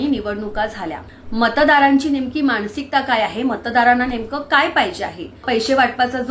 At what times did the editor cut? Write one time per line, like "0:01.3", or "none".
0:01.1
0:05.4

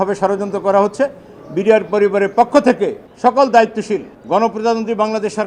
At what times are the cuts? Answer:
0:03.0
0:04.1

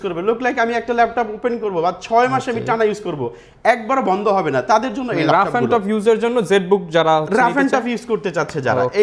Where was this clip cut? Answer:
none

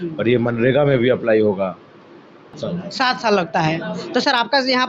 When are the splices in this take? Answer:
0:02.6

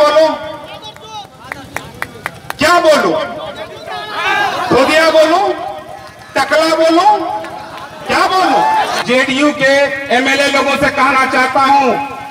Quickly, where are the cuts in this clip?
0:09.0

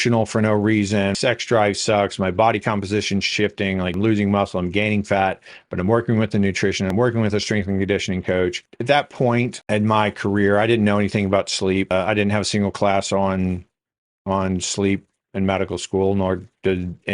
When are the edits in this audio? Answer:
0:01.1
0:03.9
0:06.9
0:08.7
0:09.6
0:11.9

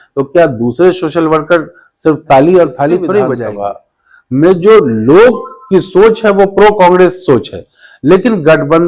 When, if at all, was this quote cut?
0:03.5

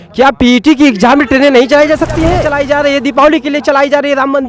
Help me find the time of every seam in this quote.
0:02.4

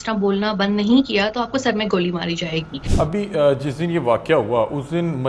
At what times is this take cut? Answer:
0:02.8

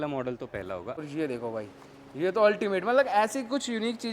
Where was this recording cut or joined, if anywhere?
0:01.0

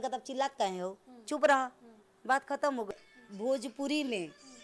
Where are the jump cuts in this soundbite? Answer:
0:02.9

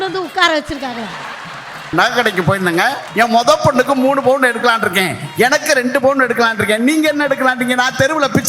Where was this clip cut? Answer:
0:01.9
0:03.0

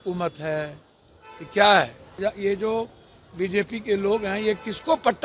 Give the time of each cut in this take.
0:02.2

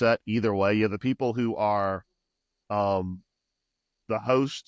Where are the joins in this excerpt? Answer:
none

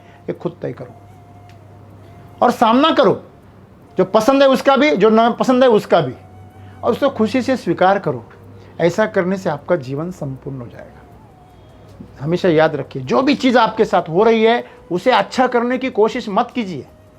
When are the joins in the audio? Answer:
0:11.4

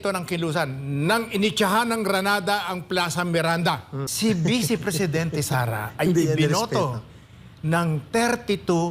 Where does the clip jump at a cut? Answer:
0:04.1

